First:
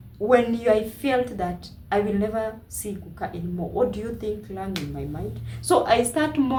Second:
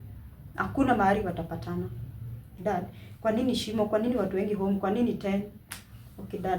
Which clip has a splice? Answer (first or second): second